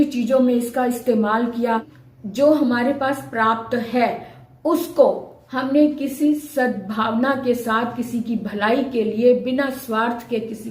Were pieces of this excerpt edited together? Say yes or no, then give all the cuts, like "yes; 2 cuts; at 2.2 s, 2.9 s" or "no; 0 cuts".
yes; 1 cut; at 1.9 s